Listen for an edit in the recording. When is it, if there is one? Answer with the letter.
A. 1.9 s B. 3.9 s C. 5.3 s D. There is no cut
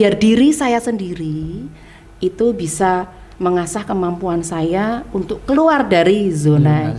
D